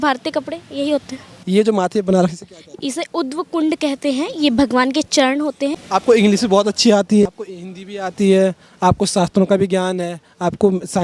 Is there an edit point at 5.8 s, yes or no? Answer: yes